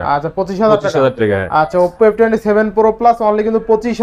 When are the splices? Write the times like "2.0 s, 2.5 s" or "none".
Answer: none